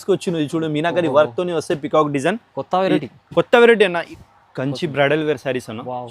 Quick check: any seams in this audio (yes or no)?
yes